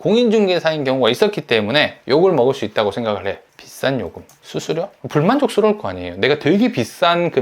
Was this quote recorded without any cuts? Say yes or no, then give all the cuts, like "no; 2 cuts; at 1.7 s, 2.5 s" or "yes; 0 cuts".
no; 2 cuts; at 3.4 s, 5.0 s